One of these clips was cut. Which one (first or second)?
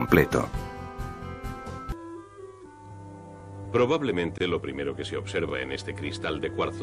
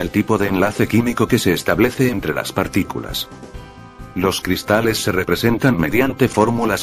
first